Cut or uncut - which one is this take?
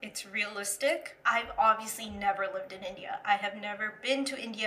cut